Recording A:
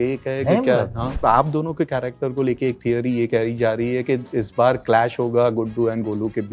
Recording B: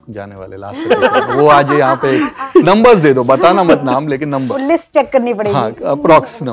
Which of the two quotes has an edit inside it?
A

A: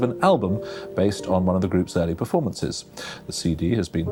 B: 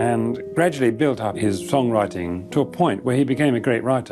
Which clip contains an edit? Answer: B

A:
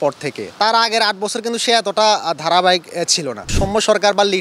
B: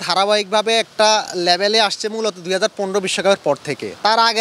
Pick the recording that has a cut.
A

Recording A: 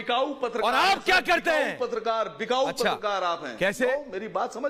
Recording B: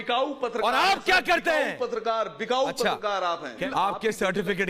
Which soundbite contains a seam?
B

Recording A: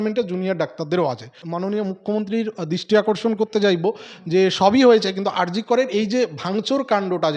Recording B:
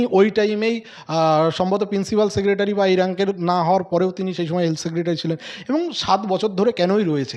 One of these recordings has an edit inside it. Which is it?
A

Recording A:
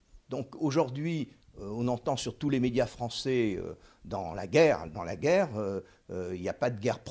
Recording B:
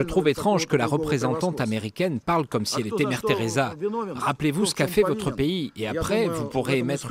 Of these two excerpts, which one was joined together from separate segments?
A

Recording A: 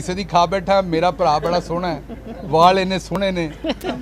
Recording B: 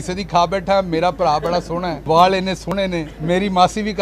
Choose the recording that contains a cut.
B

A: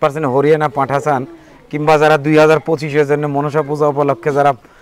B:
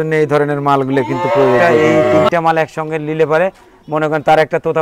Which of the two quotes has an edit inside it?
B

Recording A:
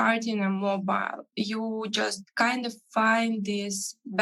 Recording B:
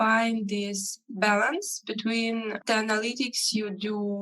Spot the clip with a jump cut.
B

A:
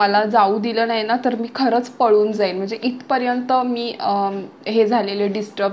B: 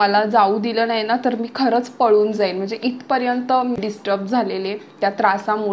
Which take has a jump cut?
B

